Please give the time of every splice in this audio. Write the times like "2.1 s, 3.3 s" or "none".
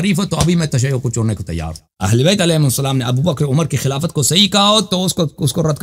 none